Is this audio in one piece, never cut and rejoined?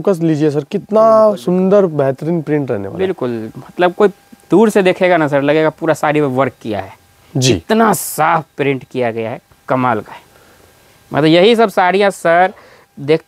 yes; 0 cuts

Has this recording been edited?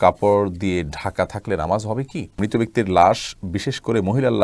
yes; 1 cut; at 2.4 s

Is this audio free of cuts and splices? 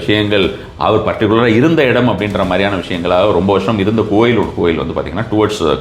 yes; 0 cuts

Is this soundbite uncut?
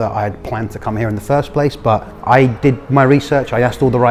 yes; 0 cuts

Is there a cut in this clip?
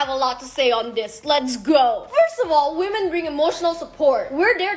no; 0 cuts

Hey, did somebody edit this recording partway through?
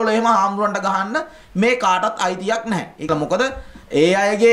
yes; 1 cut; at 3.1 s

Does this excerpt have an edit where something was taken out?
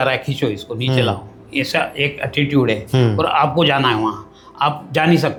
no; 0 cuts

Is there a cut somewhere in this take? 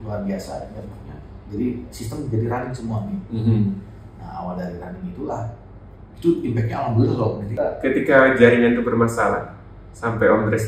yes; 1 cut; at 7.4 s

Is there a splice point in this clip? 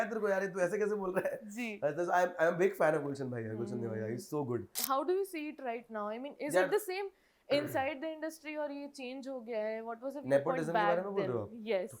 yes; 1 cut; at 4.7 s

